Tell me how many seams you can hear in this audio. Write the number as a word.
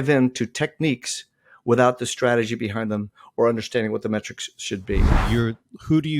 one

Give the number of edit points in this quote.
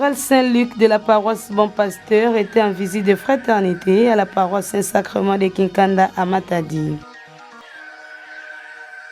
one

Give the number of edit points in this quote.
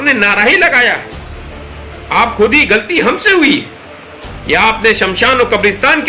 zero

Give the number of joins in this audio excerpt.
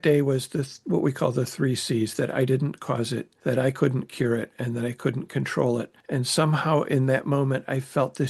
two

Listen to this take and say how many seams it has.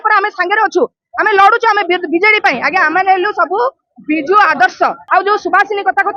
one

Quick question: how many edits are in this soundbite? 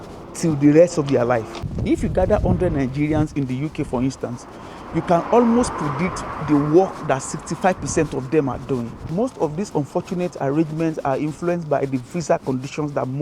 one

